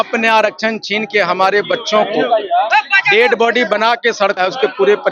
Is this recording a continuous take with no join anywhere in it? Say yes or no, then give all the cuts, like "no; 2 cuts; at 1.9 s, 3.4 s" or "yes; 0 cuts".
yes; 0 cuts